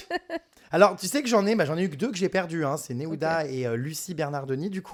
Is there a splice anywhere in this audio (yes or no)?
no